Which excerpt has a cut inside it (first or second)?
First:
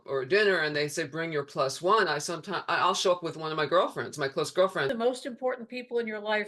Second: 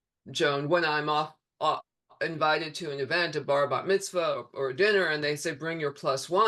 first